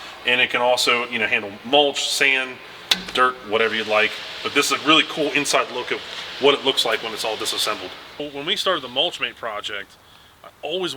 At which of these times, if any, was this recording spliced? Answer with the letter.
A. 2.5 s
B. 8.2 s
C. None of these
B